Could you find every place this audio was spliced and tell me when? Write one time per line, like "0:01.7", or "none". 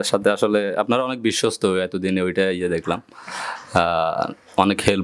none